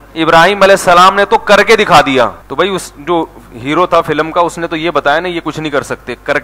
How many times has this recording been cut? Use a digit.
1